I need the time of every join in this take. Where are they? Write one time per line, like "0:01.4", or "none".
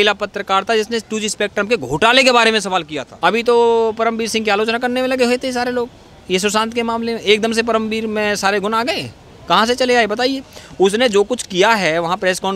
0:03.0